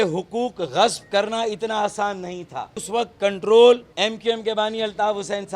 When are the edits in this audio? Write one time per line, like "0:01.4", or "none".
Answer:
0:02.8
0:03.9